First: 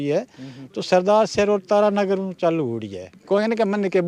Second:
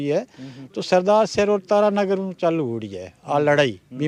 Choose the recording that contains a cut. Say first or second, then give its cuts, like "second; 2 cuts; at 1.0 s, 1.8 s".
first; 1 cut; at 3.1 s